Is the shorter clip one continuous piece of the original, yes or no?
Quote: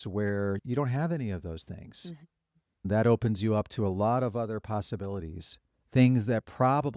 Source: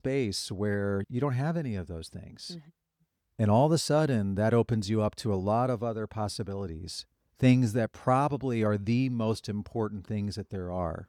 no